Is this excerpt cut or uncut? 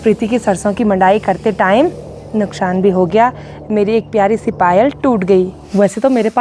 uncut